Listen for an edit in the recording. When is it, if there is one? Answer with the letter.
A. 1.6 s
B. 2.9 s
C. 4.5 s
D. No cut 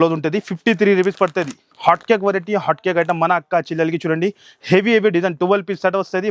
A